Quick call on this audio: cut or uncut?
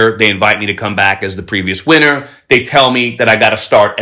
uncut